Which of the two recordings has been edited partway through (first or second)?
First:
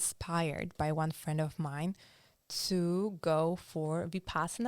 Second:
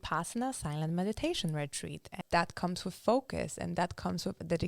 second